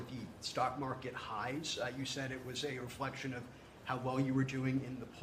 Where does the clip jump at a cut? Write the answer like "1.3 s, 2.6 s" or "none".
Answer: none